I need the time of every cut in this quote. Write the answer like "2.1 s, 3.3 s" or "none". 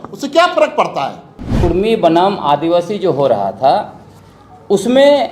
1.6 s